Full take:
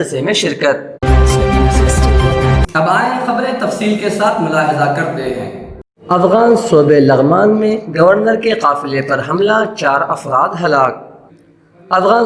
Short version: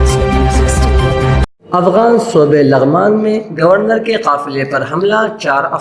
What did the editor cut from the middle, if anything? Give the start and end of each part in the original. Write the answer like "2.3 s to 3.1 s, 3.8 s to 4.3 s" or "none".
2.7 s to 5.8 s